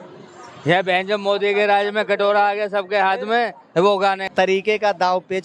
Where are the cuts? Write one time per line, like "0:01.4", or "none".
0:04.2